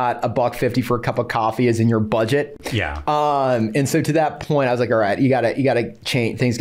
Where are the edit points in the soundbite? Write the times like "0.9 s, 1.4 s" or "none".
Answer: none